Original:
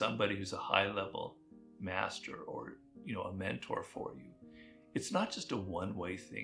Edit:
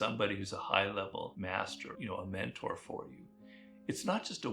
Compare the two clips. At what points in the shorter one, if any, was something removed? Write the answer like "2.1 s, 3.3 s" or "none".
1.7 s

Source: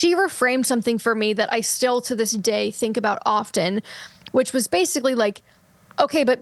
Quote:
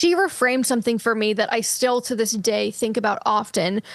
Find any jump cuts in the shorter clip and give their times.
none

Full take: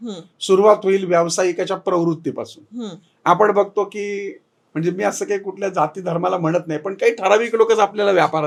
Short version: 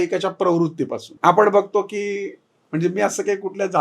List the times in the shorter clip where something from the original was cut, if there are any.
1.0 s

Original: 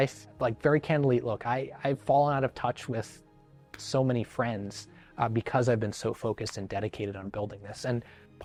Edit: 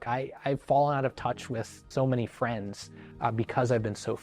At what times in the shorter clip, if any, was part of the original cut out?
1.8 s

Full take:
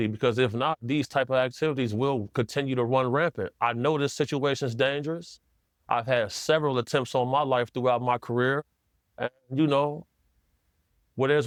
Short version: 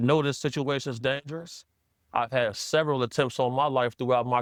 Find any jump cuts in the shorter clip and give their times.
none

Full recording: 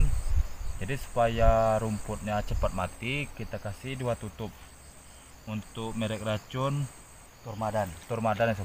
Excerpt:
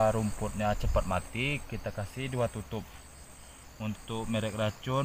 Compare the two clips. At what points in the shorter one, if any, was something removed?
none

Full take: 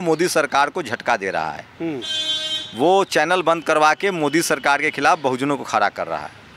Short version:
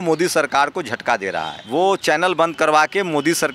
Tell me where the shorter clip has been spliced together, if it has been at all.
1.6 s

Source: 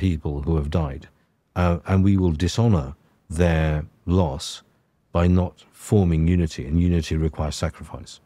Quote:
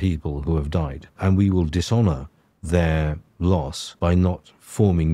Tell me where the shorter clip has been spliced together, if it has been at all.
1.2 s, 3.8 s

